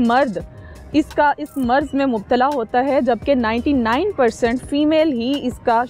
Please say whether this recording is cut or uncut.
uncut